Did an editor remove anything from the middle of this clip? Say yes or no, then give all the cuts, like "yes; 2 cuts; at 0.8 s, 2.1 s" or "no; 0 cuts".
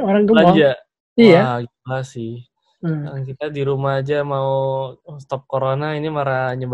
no; 0 cuts